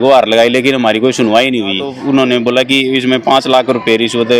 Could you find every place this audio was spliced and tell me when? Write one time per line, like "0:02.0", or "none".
0:01.9